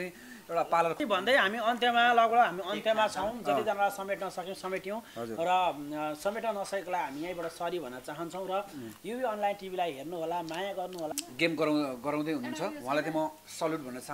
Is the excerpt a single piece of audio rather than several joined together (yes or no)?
no